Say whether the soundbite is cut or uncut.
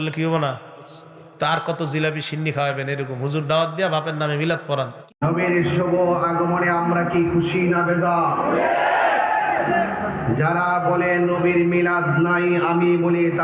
cut